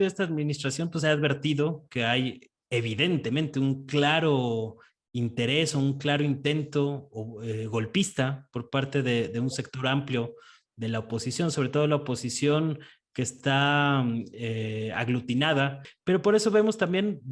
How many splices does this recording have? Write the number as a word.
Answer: one